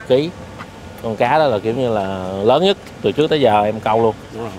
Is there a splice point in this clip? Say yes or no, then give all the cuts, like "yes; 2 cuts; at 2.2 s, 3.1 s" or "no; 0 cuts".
no; 0 cuts